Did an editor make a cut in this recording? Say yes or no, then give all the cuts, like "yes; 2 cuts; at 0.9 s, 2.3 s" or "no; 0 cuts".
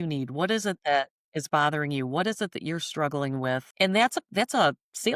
yes; 1 cut; at 3.7 s